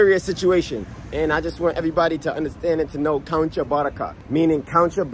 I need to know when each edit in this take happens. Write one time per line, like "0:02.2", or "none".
0:04.1